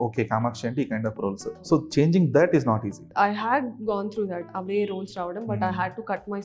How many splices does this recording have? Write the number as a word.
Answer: two